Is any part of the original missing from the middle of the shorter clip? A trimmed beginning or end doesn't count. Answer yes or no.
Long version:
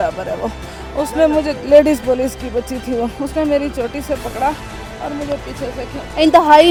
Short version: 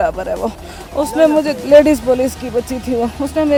no